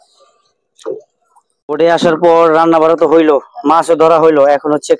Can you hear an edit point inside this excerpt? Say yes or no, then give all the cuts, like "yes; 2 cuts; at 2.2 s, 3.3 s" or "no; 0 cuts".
yes; 1 cut; at 1.6 s